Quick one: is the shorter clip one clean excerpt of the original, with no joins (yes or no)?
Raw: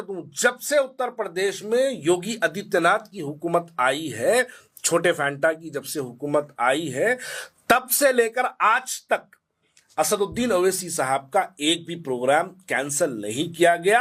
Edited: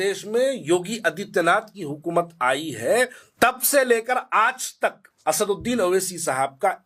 no